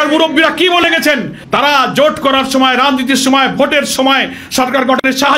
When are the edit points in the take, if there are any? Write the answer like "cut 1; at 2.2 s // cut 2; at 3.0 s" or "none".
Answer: none